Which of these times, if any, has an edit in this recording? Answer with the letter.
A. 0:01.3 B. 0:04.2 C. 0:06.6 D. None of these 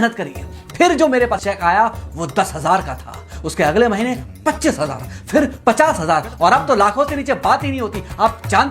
A